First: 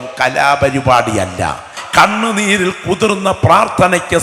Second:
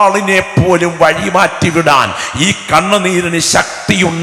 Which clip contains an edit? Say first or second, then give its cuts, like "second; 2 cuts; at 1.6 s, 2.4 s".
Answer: first; 1 cut; at 1.8 s